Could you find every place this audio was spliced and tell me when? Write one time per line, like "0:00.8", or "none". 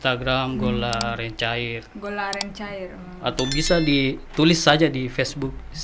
none